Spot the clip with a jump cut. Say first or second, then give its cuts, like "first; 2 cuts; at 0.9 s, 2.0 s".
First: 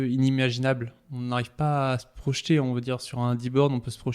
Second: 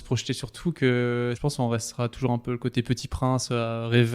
second; 1 cut; at 1.4 s